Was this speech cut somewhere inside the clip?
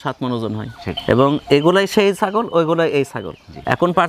no; 0 cuts

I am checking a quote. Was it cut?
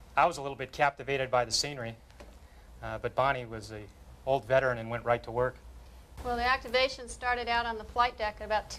no; 0 cuts

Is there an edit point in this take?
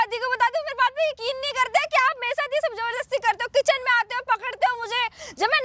no; 0 cuts

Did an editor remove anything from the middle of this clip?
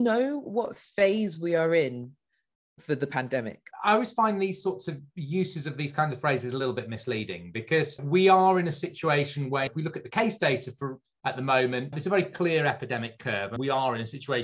yes; 2 cuts; at 3.7 s, 13.5 s

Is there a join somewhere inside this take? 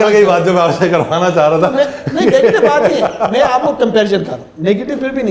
no; 0 cuts

